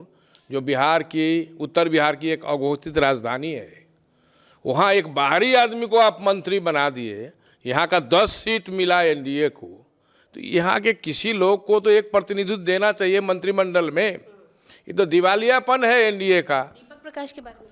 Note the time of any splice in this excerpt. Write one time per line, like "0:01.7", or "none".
none